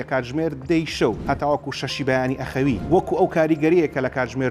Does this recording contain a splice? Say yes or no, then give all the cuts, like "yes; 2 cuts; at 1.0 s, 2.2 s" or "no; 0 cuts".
yes; 2 cuts; at 1.2 s, 2.8 s